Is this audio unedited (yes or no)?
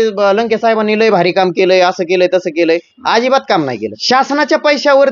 no